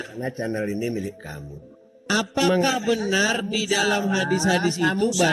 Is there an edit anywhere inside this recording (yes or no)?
yes